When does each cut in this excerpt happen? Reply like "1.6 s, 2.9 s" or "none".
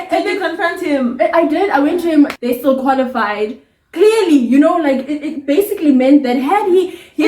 2.4 s